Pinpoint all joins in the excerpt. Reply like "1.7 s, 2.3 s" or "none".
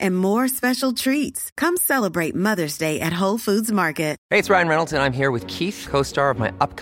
4.2 s